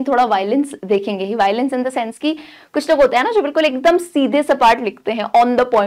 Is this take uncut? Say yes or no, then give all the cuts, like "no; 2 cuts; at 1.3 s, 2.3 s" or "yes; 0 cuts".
yes; 0 cuts